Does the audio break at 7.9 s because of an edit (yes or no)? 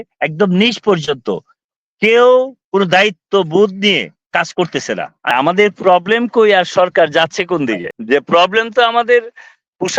yes